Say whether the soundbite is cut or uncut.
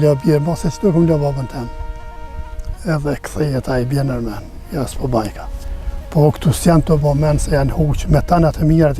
uncut